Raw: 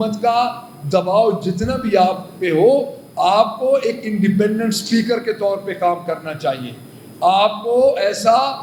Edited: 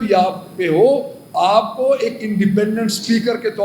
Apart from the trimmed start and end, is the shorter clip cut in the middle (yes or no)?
no